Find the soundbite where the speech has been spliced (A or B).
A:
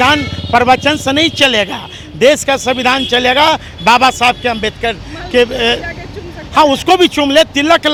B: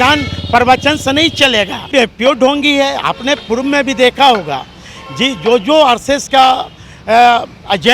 B